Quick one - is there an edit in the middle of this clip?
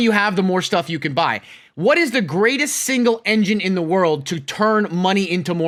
no; 0 cuts

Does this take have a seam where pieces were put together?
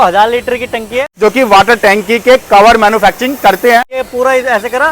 yes; 2 cuts; at 1.0 s, 4.0 s

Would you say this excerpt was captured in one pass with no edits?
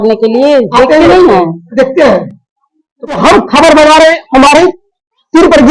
no; 1 cut; at 3.2 s

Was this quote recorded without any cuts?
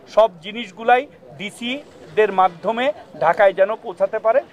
yes; 0 cuts

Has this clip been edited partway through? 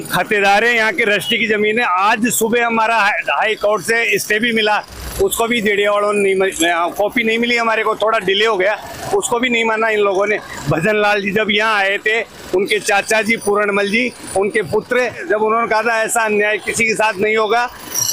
no; 0 cuts

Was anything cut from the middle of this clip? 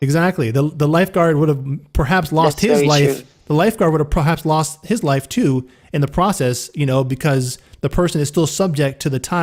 no; 0 cuts

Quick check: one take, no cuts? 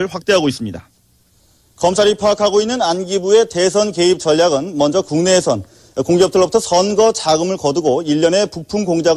no; 1 cut; at 6.2 s

